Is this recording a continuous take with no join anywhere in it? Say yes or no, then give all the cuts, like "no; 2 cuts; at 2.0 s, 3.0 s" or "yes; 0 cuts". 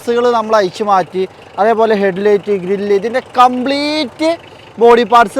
yes; 0 cuts